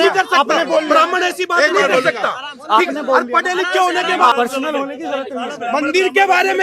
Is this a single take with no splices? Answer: no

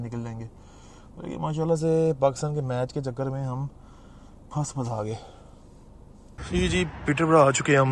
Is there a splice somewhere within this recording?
yes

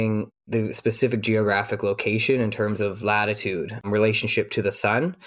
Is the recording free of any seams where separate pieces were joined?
yes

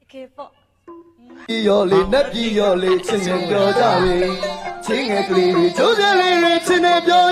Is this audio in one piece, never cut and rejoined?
yes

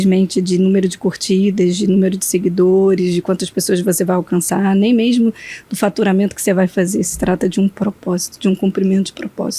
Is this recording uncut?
yes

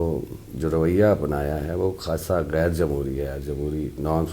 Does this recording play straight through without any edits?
yes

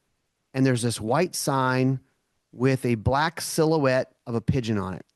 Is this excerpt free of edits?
yes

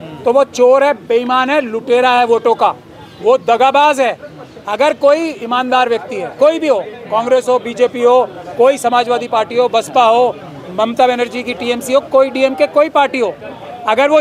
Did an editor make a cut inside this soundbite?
no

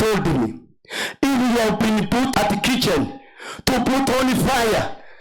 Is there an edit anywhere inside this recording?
yes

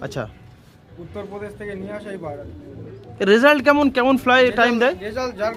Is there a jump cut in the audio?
no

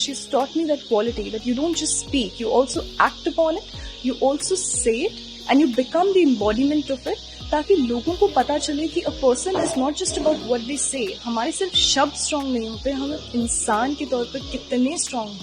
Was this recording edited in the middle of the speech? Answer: no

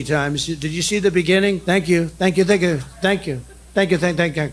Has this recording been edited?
yes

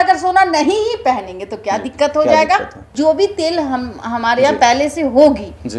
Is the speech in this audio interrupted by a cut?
no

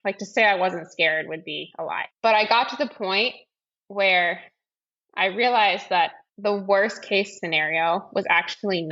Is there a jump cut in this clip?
yes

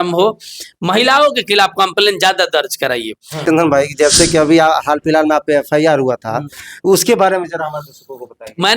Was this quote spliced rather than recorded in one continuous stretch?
yes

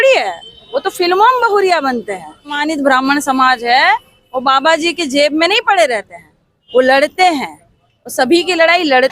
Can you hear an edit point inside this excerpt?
yes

